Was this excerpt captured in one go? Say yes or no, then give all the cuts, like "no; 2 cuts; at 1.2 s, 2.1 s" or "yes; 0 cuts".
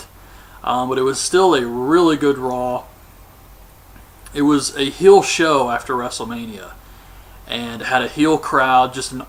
yes; 0 cuts